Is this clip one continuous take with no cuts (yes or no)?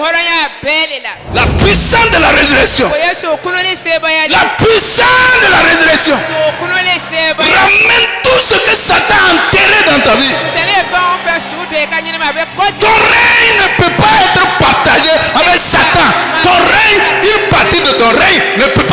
no